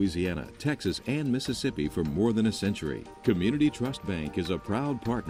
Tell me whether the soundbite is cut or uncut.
uncut